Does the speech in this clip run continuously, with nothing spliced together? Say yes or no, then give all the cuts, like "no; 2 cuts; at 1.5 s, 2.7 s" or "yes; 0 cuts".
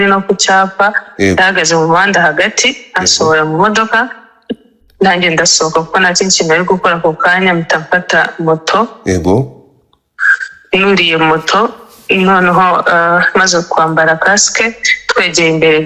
yes; 0 cuts